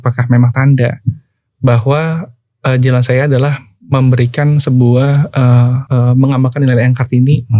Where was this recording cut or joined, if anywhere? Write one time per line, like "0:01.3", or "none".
0:05.8